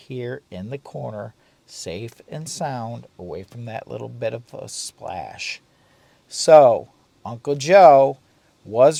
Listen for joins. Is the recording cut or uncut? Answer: uncut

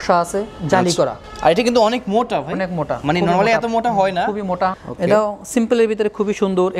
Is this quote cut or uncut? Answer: cut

